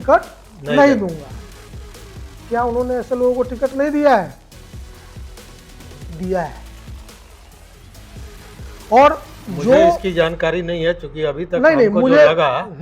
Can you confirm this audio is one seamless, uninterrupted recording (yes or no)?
yes